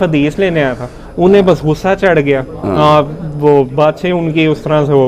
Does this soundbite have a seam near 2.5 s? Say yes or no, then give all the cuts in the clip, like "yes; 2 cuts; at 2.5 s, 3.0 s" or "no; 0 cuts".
no; 0 cuts